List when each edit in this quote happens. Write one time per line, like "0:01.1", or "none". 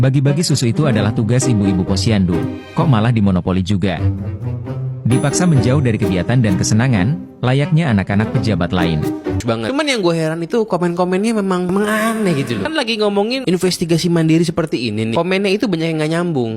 0:09.4